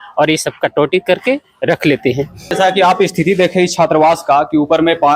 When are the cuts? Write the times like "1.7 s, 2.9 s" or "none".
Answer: 2.5 s